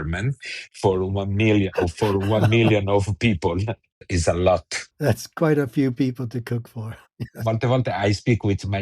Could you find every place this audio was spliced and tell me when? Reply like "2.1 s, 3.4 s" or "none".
4.0 s